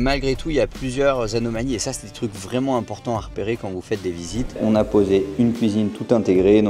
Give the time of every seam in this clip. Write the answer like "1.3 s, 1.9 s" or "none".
4.6 s